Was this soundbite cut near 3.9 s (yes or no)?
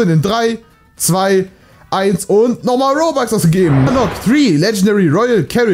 yes